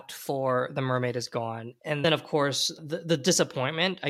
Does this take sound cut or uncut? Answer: uncut